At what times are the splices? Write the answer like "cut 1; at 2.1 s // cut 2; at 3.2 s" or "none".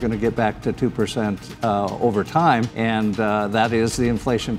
cut 1; at 2.7 s